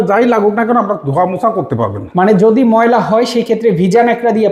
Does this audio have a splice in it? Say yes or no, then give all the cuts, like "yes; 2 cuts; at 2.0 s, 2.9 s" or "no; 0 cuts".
no; 0 cuts